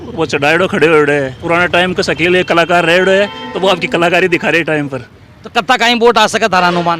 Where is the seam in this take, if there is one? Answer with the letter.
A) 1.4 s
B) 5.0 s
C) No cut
A